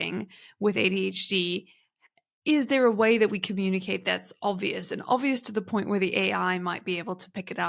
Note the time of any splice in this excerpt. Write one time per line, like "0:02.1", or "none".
none